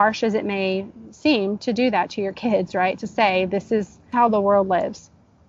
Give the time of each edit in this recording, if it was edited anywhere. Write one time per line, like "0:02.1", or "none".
0:04.1